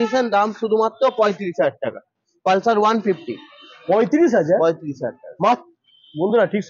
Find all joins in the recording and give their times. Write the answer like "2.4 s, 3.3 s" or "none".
none